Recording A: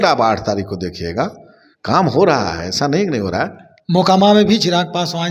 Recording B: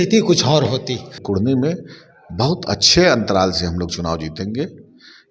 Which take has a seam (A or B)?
B